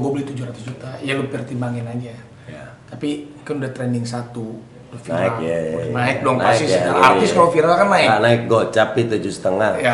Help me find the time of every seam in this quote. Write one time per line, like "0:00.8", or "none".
none